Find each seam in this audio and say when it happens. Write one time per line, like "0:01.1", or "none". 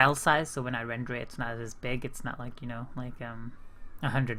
0:00.9